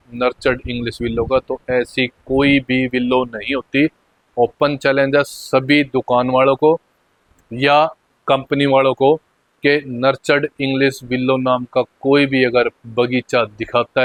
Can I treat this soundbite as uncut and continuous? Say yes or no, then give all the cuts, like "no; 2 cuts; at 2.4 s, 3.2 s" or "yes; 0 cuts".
yes; 0 cuts